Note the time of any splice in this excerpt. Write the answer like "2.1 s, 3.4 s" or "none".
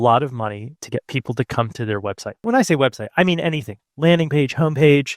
2.4 s